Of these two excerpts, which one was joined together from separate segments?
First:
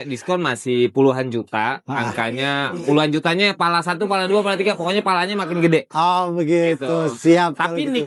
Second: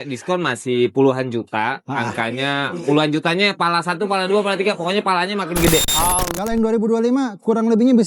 second; 1 cut; at 6.3 s

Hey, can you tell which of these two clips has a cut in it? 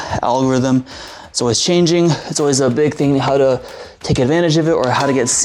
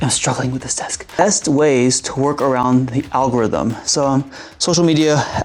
second; 1 cut; at 1.0 s

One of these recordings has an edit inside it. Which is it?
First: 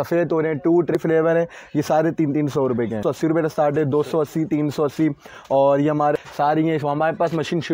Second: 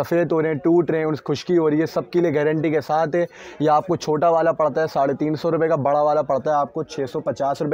first; 3 cuts; at 1.0 s, 3.0 s, 6.2 s

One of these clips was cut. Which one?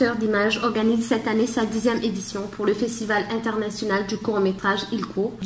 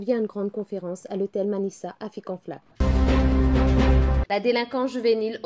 second; 2 cuts; at 2.7 s, 4.2 s

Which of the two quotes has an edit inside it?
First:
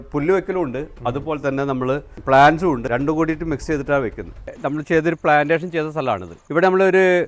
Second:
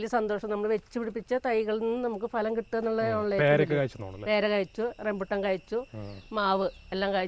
first; 4 cuts; at 2.1 s, 2.9 s, 4.4 s, 6.3 s

